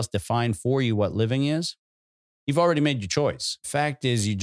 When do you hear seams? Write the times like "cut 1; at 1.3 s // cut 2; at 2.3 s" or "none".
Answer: cut 1; at 3.5 s